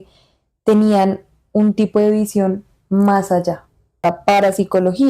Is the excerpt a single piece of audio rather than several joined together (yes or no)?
no